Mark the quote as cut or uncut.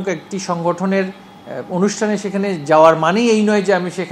uncut